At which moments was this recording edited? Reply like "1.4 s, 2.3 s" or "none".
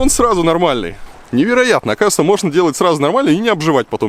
none